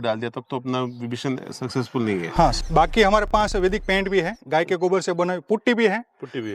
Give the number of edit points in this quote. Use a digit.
1